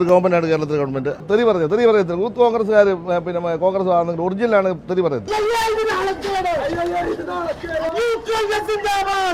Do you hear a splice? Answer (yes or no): yes